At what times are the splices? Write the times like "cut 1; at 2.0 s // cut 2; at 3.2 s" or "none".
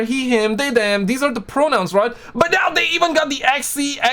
none